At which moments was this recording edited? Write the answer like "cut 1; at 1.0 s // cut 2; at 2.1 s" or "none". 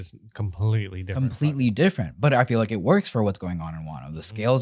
none